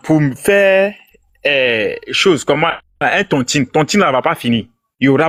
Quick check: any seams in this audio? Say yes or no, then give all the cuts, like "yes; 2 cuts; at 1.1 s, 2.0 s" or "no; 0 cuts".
no; 0 cuts